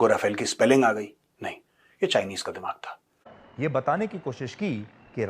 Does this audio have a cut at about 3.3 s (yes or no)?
yes